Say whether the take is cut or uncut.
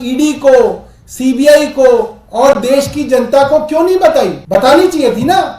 cut